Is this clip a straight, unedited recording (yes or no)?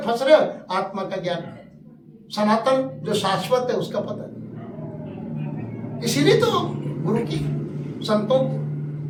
yes